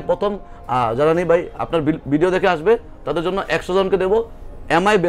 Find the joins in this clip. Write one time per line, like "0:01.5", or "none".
none